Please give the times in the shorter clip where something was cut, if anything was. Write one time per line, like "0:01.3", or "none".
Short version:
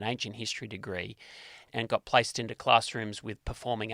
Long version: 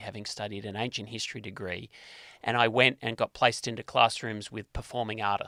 0:01.7